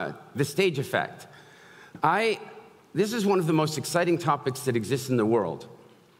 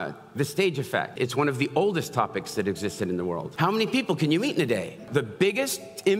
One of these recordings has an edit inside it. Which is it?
second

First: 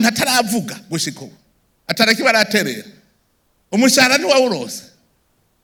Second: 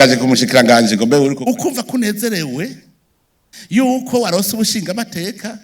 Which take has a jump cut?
second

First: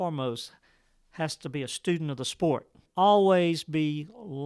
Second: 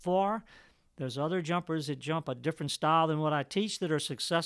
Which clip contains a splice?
first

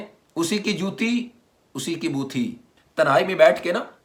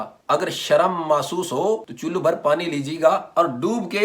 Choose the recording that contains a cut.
second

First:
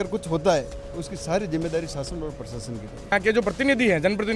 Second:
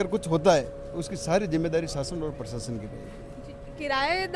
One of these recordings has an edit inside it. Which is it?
first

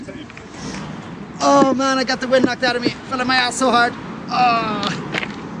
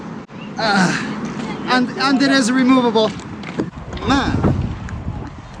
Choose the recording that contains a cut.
second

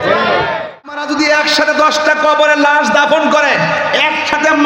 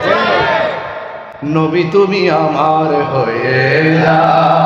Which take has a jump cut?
first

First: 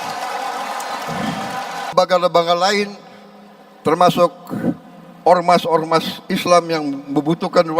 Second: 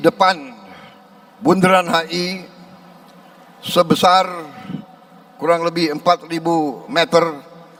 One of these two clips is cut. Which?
first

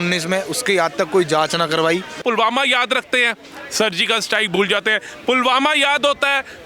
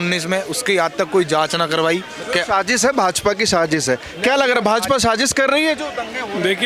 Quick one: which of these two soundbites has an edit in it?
first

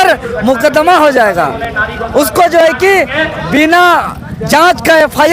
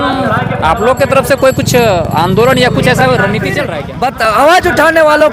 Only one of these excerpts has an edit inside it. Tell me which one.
second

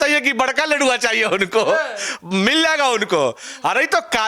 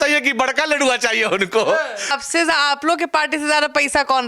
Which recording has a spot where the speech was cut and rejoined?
second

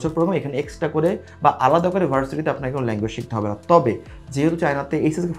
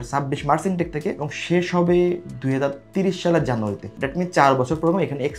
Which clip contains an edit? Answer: second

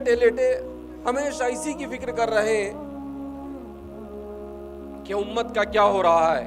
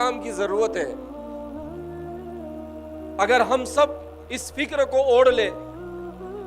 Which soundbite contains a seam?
second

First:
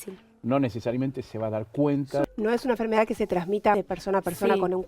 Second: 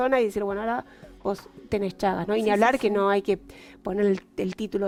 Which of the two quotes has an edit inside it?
first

